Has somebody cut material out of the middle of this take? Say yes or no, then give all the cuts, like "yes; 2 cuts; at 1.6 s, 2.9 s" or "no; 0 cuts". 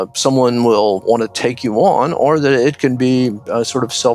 yes; 1 cut; at 1.0 s